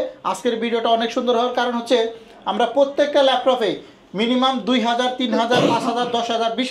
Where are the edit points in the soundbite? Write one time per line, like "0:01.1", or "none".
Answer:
none